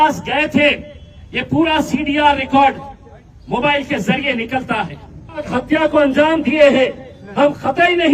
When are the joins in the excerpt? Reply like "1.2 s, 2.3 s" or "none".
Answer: 5.4 s